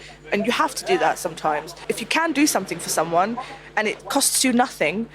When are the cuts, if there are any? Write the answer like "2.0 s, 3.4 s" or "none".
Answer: 1.8 s, 4.0 s